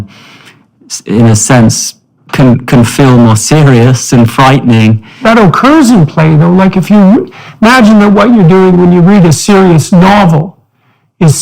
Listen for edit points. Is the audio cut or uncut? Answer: cut